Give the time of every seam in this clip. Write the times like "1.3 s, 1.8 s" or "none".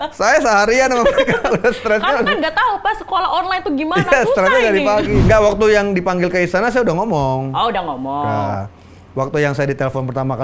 5.2 s